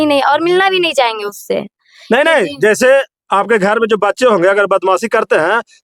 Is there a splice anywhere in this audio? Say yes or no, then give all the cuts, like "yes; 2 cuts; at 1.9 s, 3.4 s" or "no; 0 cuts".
no; 0 cuts